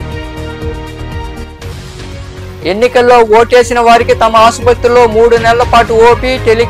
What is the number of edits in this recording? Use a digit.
1